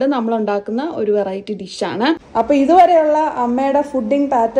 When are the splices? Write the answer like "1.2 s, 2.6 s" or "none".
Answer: 2.2 s